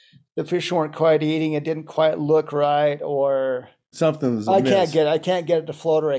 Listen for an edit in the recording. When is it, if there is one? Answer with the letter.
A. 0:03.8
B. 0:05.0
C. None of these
A